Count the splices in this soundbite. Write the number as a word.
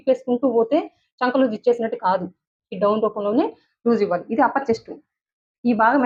zero